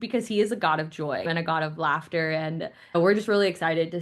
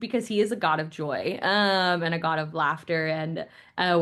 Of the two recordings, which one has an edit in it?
first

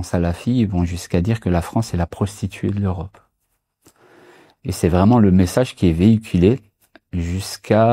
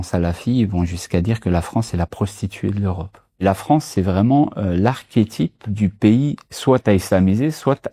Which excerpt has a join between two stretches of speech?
second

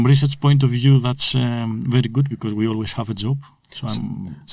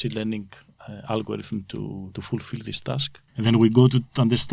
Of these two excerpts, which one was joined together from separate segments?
second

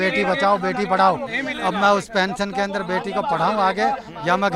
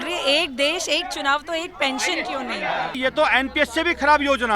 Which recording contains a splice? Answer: second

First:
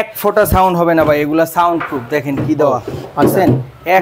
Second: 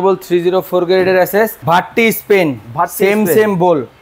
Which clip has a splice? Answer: second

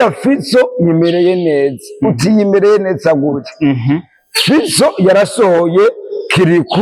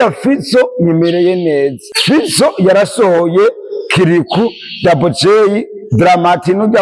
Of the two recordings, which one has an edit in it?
second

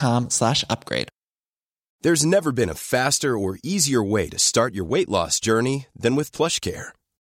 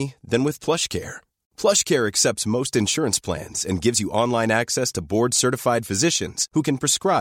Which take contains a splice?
first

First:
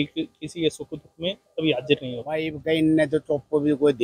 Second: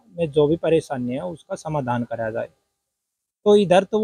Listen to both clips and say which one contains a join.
first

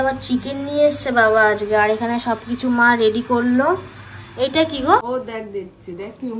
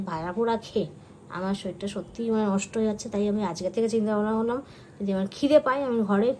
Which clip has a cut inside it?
first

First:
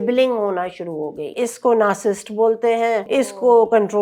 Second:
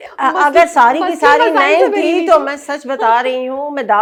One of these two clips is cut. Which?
first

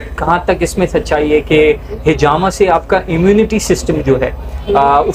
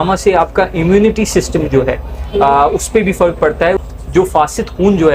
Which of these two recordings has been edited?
second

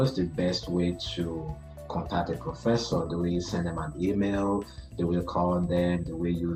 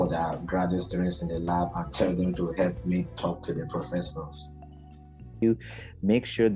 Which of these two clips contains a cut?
second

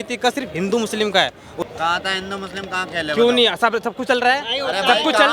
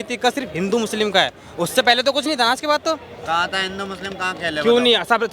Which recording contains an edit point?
first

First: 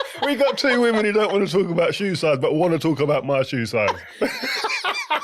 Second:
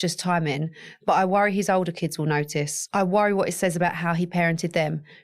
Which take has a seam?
first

